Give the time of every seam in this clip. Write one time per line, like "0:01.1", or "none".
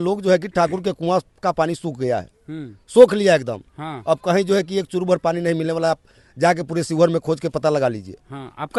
none

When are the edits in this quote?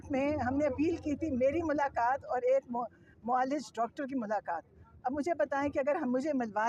none

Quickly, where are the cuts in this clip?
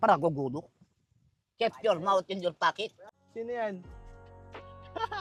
0:03.1

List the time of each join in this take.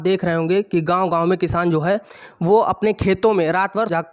none

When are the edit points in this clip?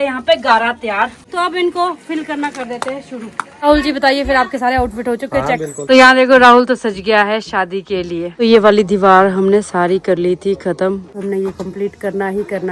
0:01.2
0:03.4
0:05.8
0:08.3
0:11.1

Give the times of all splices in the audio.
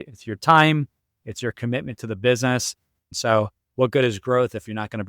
0:03.1

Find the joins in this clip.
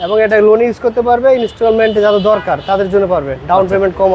none

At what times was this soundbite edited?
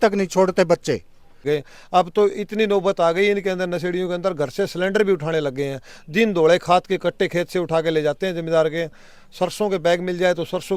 0:01.4

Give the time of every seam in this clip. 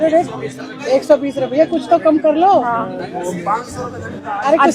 none

